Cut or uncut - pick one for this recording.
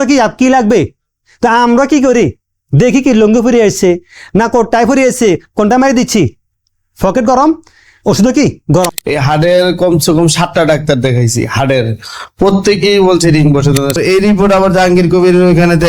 cut